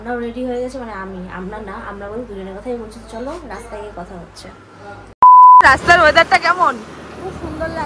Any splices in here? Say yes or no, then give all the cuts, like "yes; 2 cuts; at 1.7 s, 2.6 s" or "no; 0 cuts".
no; 0 cuts